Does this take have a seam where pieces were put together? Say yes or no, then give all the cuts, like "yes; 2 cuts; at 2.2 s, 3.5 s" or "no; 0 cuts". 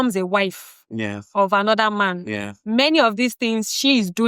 no; 0 cuts